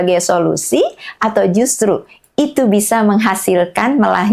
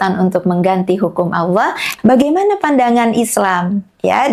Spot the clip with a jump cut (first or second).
second